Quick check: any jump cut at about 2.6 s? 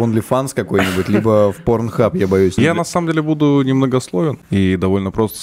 yes; 2 cuts; at 2.6 s, 4.4 s

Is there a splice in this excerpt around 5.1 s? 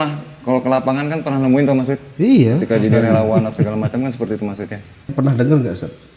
yes; 1 cut; at 5.1 s

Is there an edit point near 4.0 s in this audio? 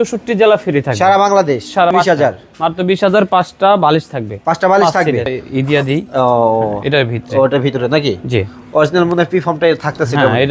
no; 2 cuts; at 1.9 s, 5.4 s

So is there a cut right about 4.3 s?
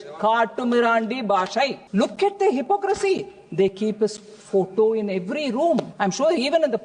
no; 2 cuts; at 1.8 s, 5.9 s

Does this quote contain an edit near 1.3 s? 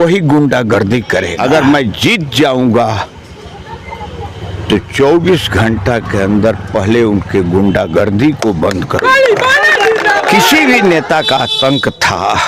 yes; 2 cuts; at 1.3 s, 10.5 s

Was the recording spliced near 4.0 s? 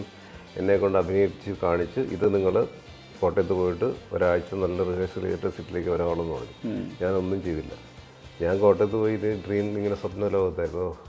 no; 0 cuts

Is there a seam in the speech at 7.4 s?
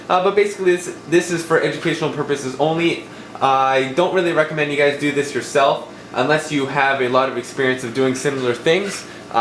yes; 1 cut; at 7.4 s

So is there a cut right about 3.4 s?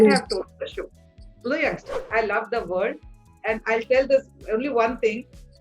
no; 1 cut; at 1.9 s

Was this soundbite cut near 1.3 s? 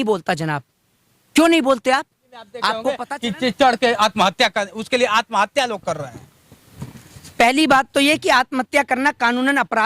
no; 1 cut; at 3.1 s

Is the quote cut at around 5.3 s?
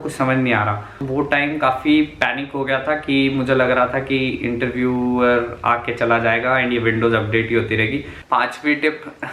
no; 2 cuts; at 1.0 s, 8.1 s

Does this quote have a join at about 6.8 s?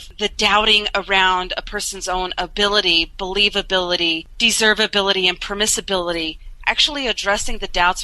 no; 1 cut; at 4.3 s

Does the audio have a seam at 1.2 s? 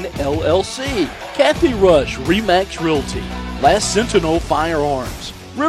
yes; 1 cut; at 1.2 s

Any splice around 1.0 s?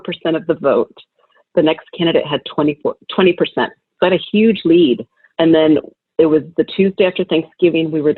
no; 0 cuts

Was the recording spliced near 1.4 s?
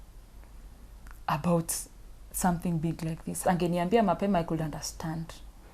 no; 1 cut; at 3.4 s

